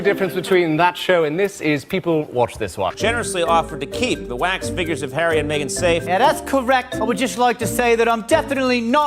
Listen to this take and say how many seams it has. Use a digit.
1